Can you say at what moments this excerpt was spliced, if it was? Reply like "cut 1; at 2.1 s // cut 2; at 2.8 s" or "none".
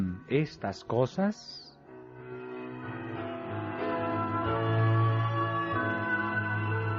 none